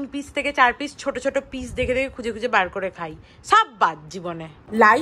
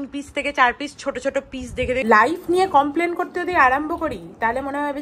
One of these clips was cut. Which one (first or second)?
second